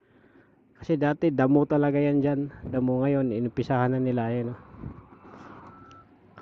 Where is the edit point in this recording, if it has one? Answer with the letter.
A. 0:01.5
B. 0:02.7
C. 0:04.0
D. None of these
B